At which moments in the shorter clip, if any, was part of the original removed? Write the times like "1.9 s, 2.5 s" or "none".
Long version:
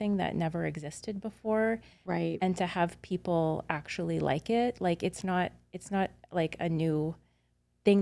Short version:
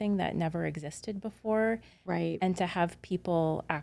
none